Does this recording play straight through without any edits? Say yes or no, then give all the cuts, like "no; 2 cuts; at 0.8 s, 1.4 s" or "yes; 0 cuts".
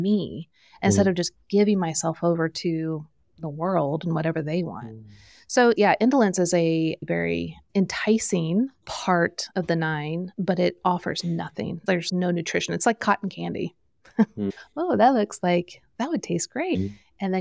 no; 3 cuts; at 5.8 s, 9.4 s, 10.3 s